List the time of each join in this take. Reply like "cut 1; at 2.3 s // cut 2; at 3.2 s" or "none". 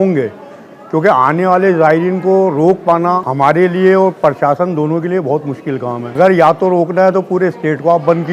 cut 1; at 3.3 s // cut 2; at 6.2 s

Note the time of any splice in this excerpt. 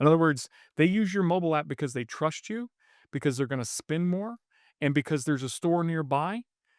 none

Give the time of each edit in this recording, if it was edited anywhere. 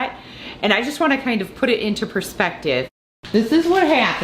cut 1; at 3.2 s

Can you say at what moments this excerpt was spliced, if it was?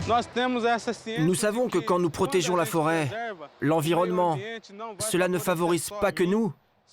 cut 1; at 1.1 s

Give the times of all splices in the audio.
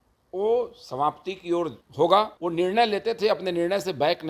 cut 1; at 1.8 s // cut 2; at 2.4 s

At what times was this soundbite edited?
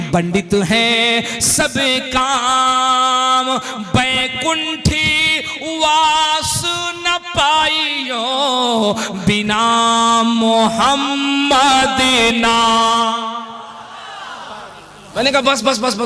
cut 1; at 15.1 s

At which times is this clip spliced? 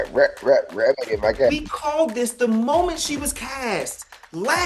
cut 1; at 1.5 s

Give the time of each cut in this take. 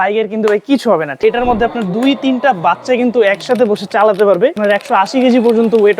cut 1; at 1.2 s // cut 2; at 4.6 s

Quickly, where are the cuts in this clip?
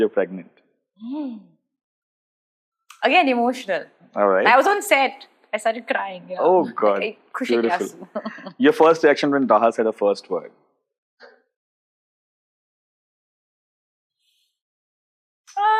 none

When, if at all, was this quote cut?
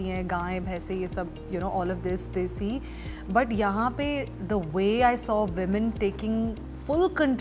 none

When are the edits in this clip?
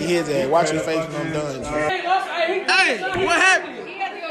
cut 1; at 1.9 s

